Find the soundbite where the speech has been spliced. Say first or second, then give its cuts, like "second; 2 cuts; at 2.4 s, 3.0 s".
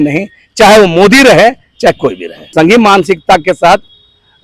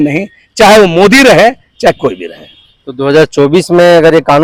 first; 1 cut; at 2.5 s